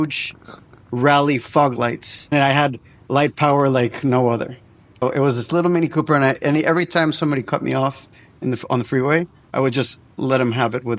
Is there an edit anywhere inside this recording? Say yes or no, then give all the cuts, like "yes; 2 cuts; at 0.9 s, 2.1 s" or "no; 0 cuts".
yes; 2 cuts; at 2.3 s, 5.0 s